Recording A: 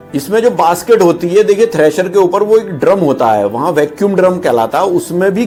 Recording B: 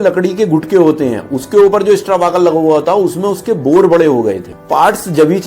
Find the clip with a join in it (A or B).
B